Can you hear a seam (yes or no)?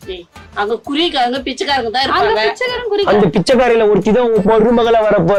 no